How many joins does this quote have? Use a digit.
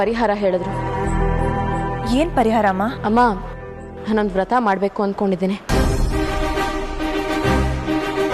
1